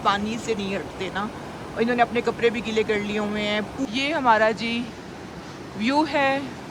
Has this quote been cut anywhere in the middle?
yes; 1 cut; at 3.9 s

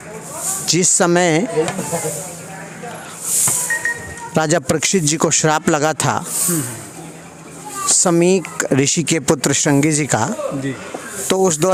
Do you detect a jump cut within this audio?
no; 0 cuts

